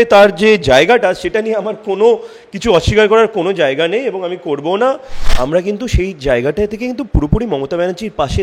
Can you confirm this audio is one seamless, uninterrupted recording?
no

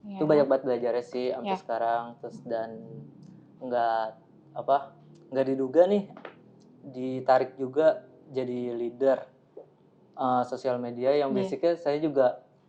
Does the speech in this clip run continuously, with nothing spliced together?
yes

